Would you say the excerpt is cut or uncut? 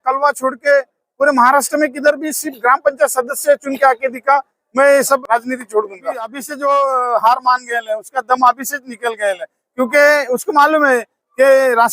cut